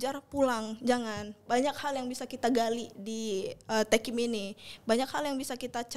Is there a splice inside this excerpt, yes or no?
no